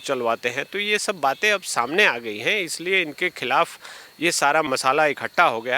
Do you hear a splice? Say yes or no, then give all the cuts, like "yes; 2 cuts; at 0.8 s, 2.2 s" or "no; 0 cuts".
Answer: no; 0 cuts